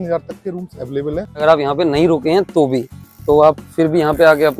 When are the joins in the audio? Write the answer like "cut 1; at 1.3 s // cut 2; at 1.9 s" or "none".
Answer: cut 1; at 1.4 s